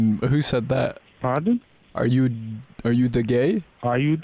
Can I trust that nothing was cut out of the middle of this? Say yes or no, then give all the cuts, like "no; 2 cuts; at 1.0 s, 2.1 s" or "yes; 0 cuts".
yes; 0 cuts